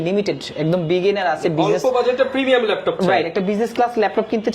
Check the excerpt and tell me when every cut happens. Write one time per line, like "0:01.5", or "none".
none

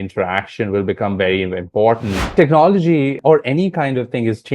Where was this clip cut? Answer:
0:02.3
0:03.2

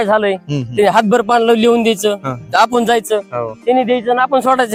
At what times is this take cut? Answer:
none

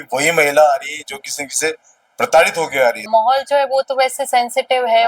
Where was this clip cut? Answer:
0:03.1

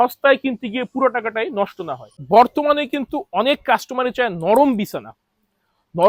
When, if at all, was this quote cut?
none

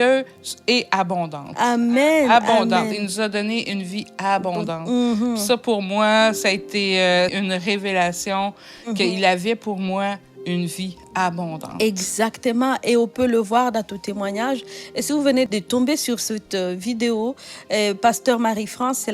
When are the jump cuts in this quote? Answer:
0:07.3
0:15.5

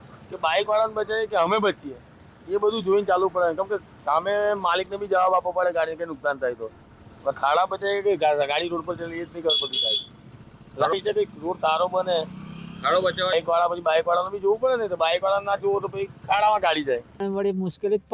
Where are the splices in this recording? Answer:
none

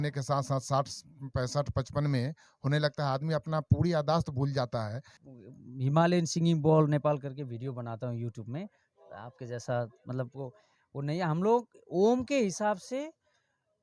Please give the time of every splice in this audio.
0:05.1

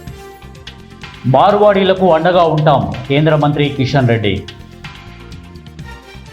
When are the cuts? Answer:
0:01.2
0:04.4

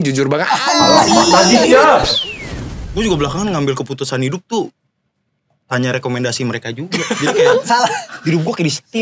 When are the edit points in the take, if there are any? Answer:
0:02.5

